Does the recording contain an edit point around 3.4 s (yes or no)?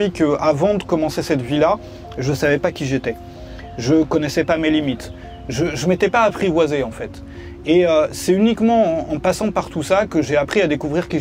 no